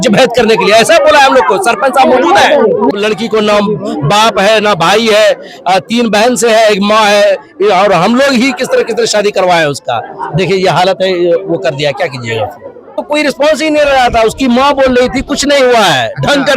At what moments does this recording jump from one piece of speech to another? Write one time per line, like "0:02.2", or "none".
0:02.9
0:12.9